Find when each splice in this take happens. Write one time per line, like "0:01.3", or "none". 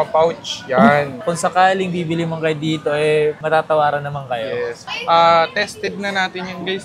0:01.2
0:04.8